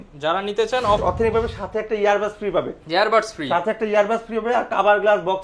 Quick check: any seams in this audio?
yes; 1 cut; at 1.0 s

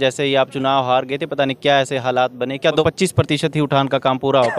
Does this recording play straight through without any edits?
no; 1 cut; at 2.8 s

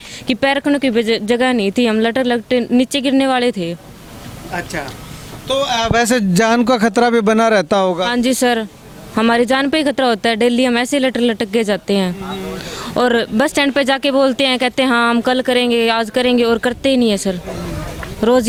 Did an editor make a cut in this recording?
no; 0 cuts

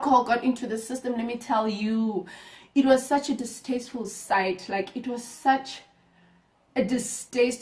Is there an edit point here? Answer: no; 0 cuts

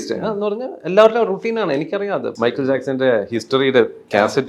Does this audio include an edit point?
yes; 1 cut; at 2.3 s

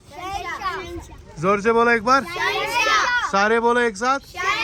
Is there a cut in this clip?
no; 0 cuts

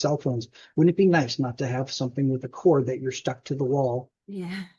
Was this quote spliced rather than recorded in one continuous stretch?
no; 0 cuts

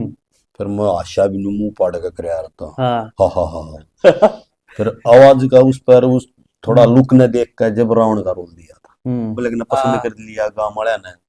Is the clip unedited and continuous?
no; 1 cut; at 9.4 s

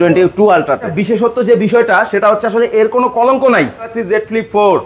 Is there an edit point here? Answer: yes; 2 cuts; at 0.9 s, 4.0 s

